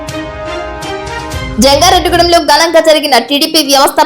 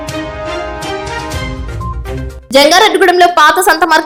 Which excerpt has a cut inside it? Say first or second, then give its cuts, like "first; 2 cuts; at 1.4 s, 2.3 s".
first; 1 cut; at 1.5 s